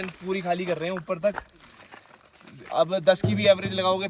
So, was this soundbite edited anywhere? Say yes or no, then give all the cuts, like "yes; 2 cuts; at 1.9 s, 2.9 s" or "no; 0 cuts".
no; 0 cuts